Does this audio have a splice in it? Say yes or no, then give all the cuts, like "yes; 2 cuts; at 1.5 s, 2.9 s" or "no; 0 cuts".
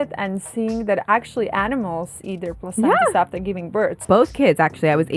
yes; 1 cut; at 4.0 s